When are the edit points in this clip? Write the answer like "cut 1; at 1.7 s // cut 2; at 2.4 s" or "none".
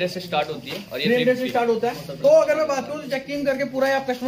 cut 1; at 2.1 s